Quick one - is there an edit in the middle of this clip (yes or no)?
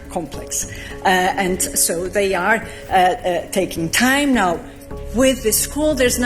no